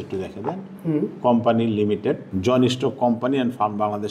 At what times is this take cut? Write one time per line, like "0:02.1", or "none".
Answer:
0:02.3